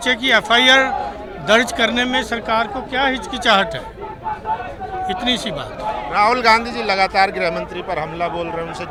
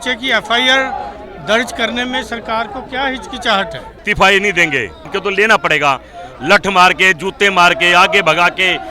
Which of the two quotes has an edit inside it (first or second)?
second